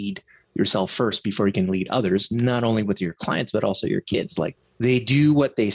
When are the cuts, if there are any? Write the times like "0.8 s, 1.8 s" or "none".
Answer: 4.5 s